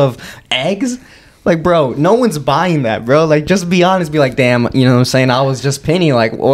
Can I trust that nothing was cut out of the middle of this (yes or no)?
yes